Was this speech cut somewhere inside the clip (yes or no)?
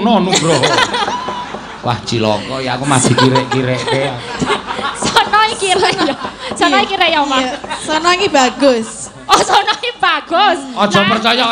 no